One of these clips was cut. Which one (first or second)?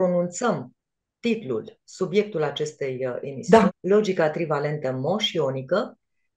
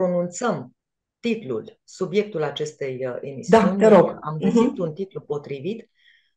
first